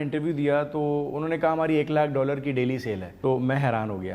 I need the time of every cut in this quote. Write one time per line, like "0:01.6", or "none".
0:03.1